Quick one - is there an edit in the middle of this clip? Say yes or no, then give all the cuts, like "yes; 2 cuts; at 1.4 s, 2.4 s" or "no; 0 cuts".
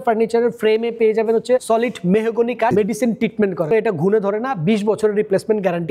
yes; 3 cuts; at 1.6 s, 2.7 s, 3.7 s